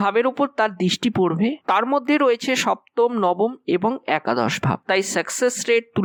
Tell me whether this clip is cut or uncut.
uncut